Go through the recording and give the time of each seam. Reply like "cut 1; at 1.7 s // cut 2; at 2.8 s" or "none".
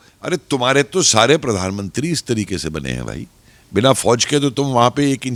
none